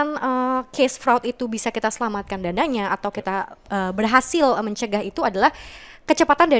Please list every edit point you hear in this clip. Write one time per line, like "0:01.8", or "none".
none